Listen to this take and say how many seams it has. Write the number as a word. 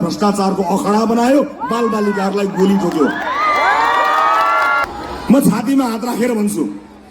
one